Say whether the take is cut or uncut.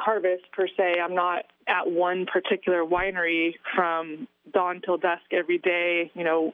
uncut